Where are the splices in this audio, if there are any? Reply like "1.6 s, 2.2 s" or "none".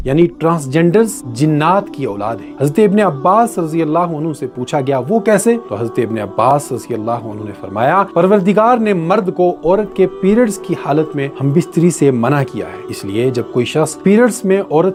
none